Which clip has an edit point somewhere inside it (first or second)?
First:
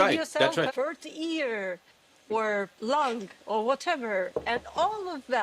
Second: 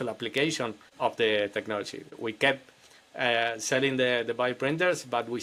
first